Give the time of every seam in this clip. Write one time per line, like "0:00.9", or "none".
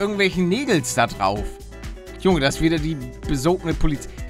none